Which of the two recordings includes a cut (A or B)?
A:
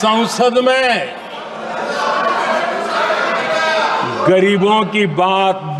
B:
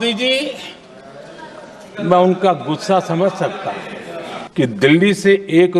B